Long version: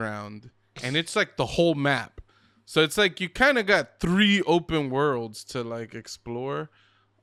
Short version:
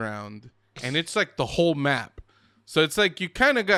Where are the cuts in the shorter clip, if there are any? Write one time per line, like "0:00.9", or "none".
none

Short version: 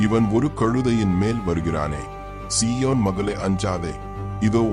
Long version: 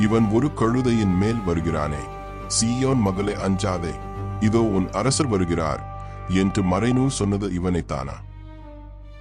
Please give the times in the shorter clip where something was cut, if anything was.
none

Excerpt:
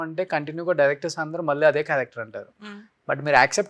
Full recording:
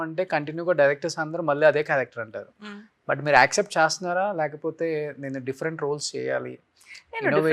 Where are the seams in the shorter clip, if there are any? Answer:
none

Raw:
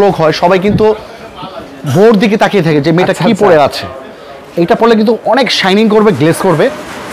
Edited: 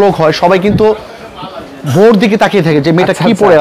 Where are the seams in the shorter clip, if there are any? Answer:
none

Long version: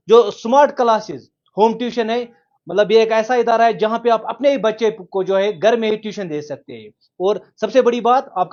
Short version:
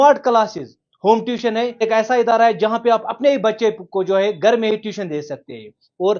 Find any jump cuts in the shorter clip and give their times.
0:01.8

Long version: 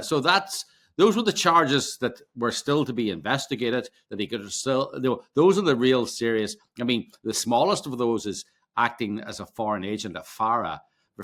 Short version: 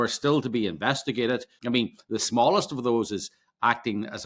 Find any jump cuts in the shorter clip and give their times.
0:01.5

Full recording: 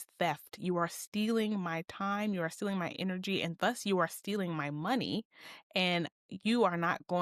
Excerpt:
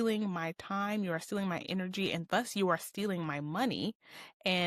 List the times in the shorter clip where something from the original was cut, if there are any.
none

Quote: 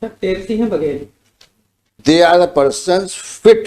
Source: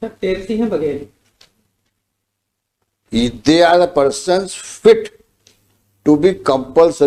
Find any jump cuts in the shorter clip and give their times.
0:02.0

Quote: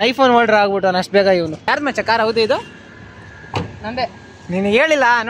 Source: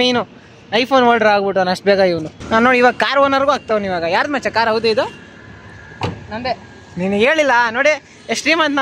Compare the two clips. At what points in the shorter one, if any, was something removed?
0:01.7

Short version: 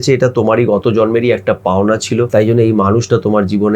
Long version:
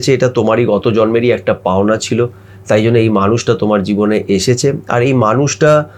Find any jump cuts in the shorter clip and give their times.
0:02.3

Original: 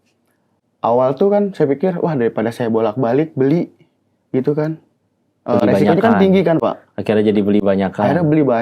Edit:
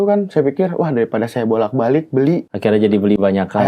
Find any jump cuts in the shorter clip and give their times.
0:02.5

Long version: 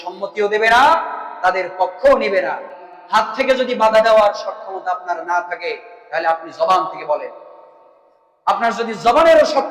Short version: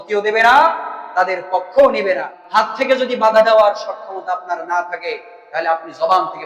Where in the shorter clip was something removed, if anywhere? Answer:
0:02.3

